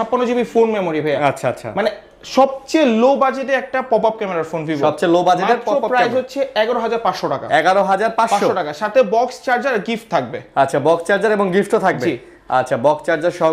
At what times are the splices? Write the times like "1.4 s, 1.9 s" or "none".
none